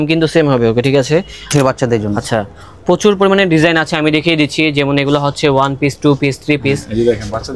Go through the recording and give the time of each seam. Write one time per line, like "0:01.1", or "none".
0:01.5